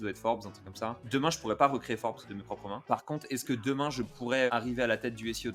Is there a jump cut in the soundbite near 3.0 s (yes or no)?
no